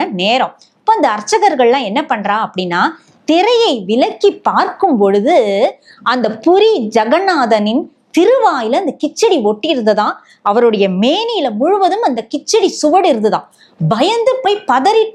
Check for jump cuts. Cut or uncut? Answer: uncut